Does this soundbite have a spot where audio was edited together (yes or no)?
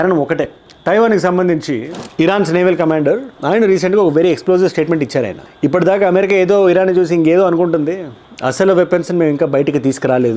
yes